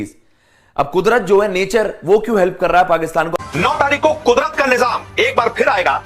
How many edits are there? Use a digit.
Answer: 1